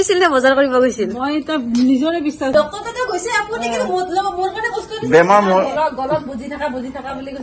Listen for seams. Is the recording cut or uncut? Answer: cut